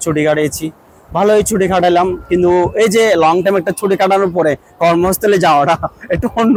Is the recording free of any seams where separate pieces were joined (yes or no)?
yes